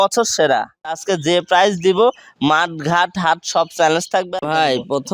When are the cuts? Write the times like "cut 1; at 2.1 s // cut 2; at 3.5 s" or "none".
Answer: cut 1; at 1.1 s // cut 2; at 4.3 s